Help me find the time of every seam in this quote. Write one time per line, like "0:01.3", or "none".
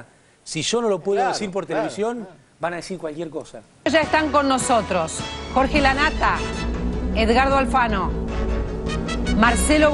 0:03.8